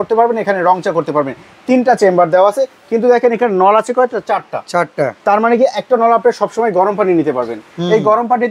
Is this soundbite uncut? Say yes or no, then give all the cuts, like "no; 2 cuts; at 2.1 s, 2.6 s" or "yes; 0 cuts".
yes; 0 cuts